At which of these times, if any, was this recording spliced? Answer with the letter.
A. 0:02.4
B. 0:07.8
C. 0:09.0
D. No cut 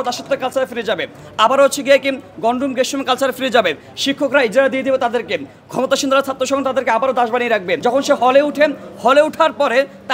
B